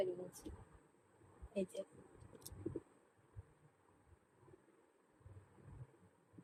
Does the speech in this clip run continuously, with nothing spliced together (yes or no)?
yes